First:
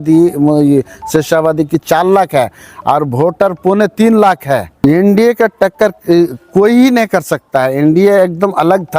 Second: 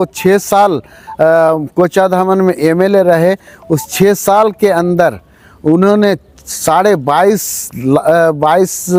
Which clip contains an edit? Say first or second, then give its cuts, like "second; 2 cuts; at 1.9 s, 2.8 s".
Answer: first; 1 cut; at 4.8 s